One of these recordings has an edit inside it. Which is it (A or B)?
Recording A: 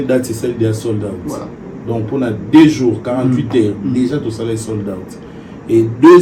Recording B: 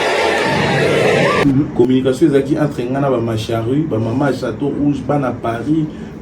B